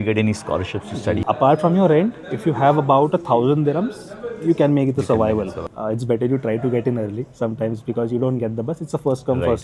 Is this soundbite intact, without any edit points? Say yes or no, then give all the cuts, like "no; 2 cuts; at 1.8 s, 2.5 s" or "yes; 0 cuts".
no; 2 cuts; at 1.2 s, 5.8 s